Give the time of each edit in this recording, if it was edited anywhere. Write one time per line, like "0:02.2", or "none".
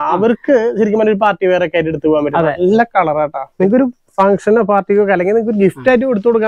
0:03.4